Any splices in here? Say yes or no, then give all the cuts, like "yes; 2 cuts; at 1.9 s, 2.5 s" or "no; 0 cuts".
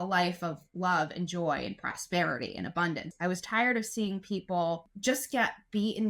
yes; 2 cuts; at 3.1 s, 4.9 s